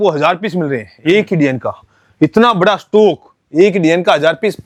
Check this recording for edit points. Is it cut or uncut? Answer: uncut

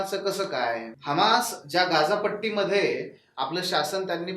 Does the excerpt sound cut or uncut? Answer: cut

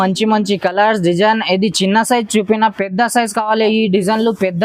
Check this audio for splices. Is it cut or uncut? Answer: uncut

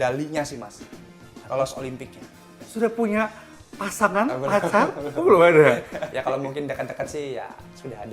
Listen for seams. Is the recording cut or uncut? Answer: cut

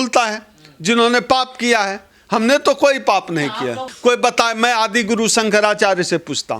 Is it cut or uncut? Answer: cut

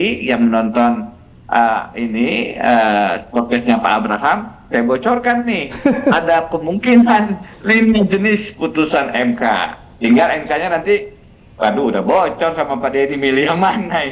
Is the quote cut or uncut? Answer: uncut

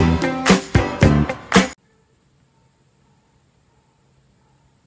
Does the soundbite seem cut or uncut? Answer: uncut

